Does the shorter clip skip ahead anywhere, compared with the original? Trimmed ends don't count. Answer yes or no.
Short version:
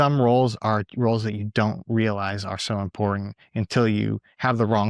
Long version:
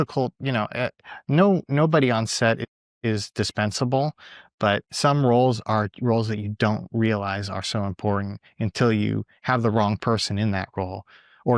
no